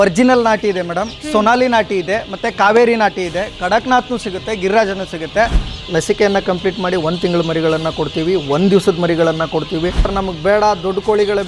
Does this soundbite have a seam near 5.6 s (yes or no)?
yes